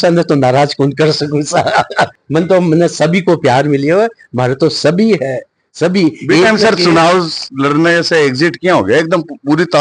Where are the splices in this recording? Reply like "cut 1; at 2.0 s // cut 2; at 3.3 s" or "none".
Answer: none

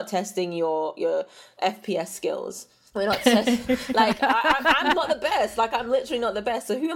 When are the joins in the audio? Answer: cut 1; at 1.5 s

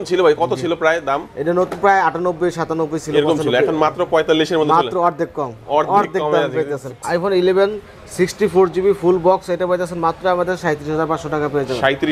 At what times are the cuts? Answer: cut 1; at 6.9 s

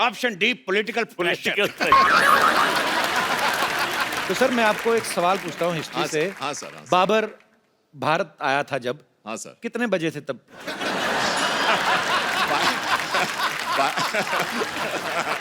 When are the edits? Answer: cut 1; at 4.2 s // cut 2; at 14.5 s

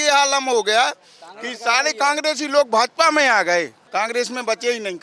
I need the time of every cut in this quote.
cut 1; at 3.8 s

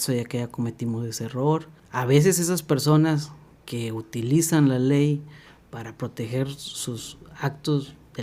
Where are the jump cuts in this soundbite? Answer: cut 1; at 1.8 s

